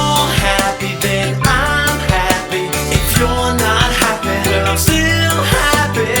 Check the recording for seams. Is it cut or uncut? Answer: uncut